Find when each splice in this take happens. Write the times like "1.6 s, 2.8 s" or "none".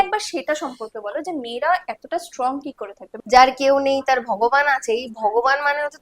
3.1 s